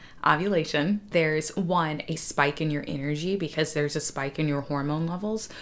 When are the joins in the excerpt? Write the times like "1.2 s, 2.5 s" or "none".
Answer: 1.1 s